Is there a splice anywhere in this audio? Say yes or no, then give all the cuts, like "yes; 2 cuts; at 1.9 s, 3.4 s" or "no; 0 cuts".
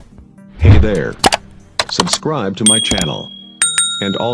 no; 0 cuts